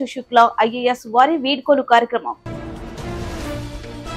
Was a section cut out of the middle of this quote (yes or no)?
yes